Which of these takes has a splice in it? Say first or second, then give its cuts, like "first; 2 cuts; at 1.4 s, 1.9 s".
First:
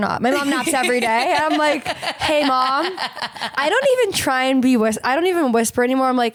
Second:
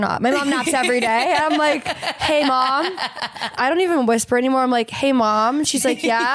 second; 1 cut; at 3.5 s